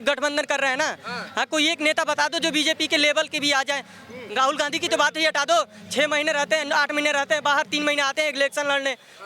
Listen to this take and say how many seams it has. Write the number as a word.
zero